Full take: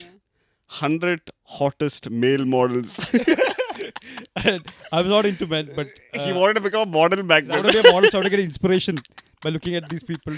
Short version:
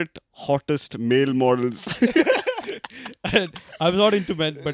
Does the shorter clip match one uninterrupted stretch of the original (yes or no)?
yes